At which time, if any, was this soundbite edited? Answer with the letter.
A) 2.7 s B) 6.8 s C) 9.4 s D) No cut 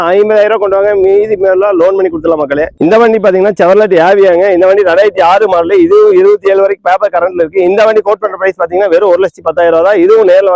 A